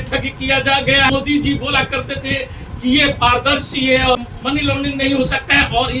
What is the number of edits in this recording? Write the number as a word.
two